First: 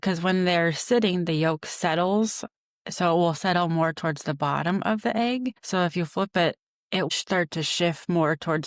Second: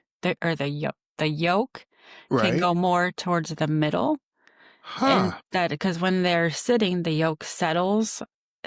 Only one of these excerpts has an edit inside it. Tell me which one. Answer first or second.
first